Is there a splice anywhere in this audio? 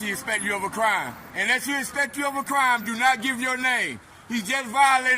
yes; 1 cut; at 1.3 s

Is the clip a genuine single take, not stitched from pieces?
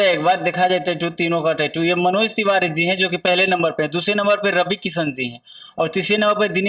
yes; 0 cuts

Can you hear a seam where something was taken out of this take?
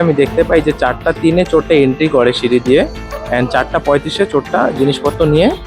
no; 0 cuts

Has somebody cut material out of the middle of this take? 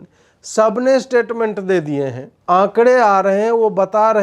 yes; 1 cut; at 2.3 s

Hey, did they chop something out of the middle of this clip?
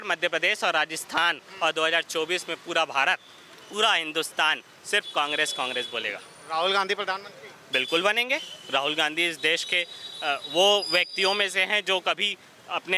no; 0 cuts

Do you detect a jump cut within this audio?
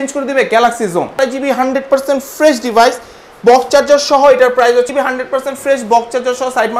yes; 2 cuts; at 1.2 s, 4.9 s

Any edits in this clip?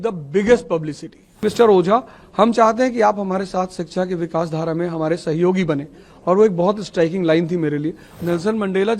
yes; 2 cuts; at 1.4 s, 8.1 s

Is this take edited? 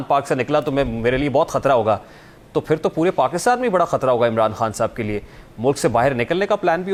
no; 0 cuts

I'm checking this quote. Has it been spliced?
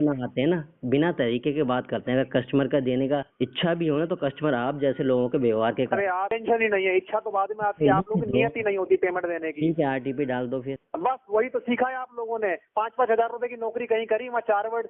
yes; 3 cuts; at 3.3 s, 6.4 s, 10.8 s

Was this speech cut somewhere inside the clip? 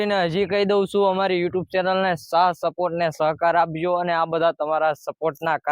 no; 0 cuts

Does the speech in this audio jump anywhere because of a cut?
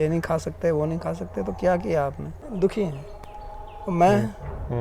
yes; 1 cut; at 2.5 s

